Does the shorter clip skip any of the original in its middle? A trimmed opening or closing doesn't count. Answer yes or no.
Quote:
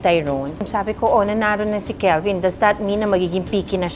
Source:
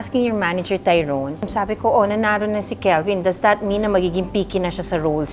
no